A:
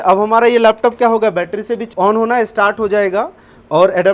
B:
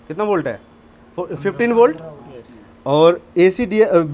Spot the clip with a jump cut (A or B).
A